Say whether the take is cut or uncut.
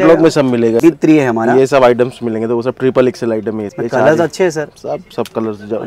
cut